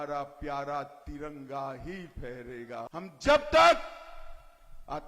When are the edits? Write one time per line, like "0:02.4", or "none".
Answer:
0:02.9